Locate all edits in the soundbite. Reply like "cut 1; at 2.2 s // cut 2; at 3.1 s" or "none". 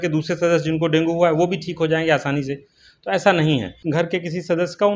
cut 1; at 3.8 s